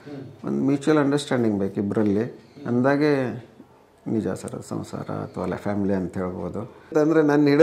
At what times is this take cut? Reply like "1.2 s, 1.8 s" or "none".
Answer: 6.7 s